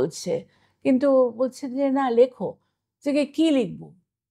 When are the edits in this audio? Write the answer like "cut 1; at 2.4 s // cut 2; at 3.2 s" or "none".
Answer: none

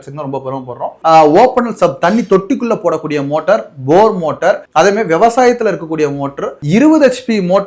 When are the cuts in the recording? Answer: cut 1; at 1.0 s // cut 2; at 6.6 s

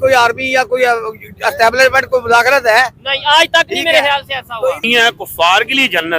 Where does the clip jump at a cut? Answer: cut 1; at 4.8 s

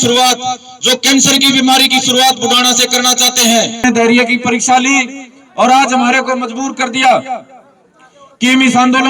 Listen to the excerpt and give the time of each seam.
cut 1; at 3.8 s

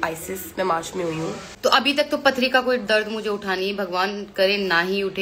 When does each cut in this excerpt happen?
cut 1; at 1.5 s

